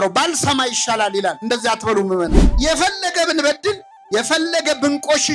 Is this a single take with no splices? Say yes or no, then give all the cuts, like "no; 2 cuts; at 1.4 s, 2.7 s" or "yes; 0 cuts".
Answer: yes; 0 cuts